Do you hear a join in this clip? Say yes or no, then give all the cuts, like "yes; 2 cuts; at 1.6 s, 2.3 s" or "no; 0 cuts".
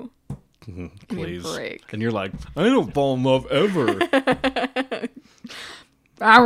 no; 0 cuts